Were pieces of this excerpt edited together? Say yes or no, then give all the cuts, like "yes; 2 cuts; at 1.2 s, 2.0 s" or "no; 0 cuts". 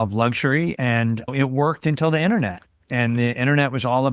yes; 1 cut; at 1.3 s